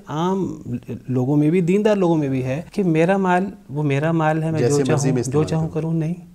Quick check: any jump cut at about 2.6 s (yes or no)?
yes